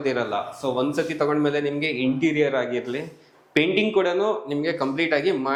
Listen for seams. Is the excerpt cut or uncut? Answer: uncut